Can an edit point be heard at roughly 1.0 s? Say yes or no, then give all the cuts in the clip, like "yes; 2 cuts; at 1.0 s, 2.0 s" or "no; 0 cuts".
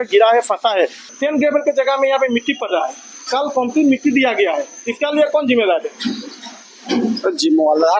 yes; 1 cut; at 1.0 s